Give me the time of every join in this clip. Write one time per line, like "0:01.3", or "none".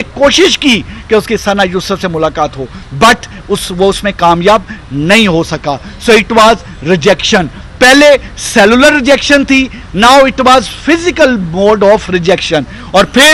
none